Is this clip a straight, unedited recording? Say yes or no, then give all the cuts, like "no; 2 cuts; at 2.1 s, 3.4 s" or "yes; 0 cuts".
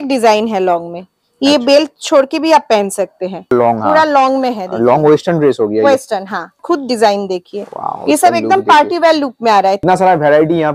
no; 3 cuts; at 3.5 s, 6.6 s, 9.8 s